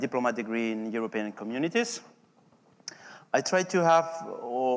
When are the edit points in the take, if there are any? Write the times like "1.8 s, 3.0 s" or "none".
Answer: 3.2 s